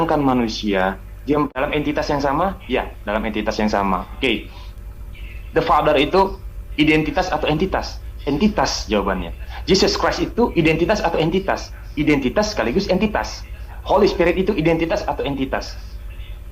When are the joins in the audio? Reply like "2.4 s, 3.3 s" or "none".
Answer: 1.6 s